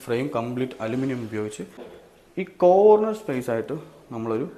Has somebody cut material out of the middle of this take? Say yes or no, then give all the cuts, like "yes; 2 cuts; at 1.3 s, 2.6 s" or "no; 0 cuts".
yes; 1 cut; at 2.0 s